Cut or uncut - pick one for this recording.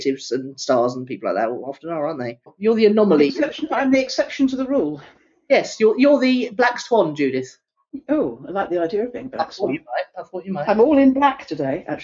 cut